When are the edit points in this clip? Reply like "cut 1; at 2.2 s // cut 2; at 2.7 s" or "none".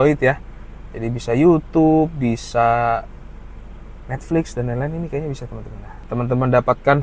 cut 1; at 6.0 s